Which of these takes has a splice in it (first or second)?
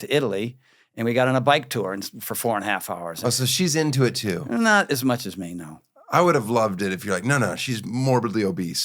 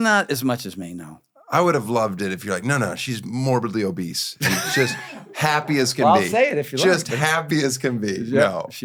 first